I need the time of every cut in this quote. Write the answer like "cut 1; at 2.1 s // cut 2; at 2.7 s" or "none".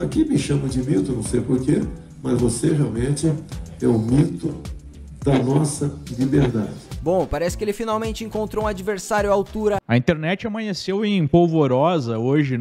cut 1; at 9.8 s